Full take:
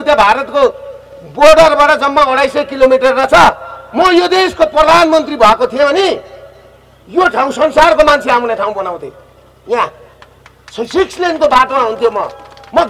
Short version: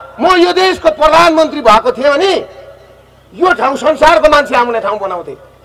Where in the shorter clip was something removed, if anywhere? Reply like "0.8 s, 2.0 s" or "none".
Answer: none